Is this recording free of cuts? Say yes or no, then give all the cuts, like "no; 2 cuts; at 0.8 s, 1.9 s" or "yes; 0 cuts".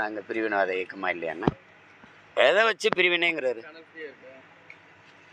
yes; 0 cuts